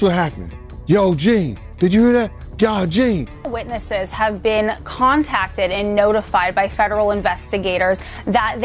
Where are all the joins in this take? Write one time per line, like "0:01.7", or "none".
0:03.5